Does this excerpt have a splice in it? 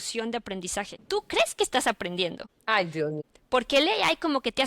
yes; 3 cuts; at 1.0 s, 2.5 s, 3.3 s

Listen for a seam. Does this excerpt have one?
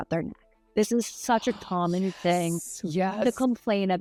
no; 0 cuts

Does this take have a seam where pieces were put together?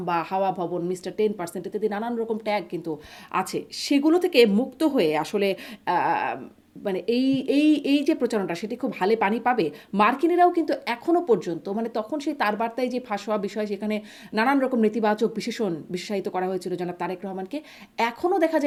no; 0 cuts

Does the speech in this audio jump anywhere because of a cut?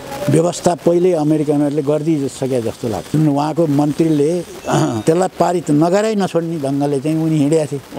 no; 0 cuts

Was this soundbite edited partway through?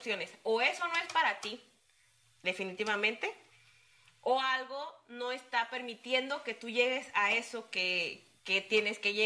no; 0 cuts

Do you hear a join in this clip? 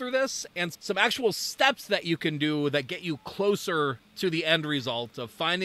no; 0 cuts

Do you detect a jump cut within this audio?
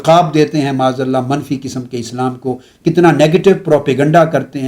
no; 0 cuts

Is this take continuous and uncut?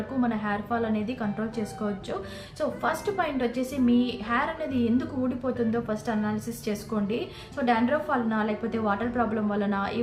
yes; 0 cuts

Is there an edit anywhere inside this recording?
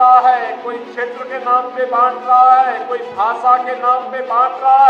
no; 0 cuts

